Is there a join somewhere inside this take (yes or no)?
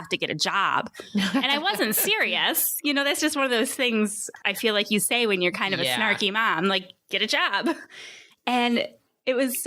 yes